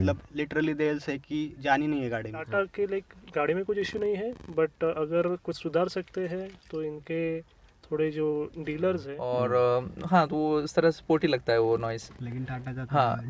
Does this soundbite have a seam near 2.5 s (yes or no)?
yes